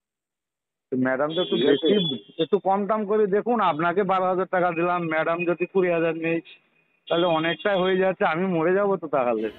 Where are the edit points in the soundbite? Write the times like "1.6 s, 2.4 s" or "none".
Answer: none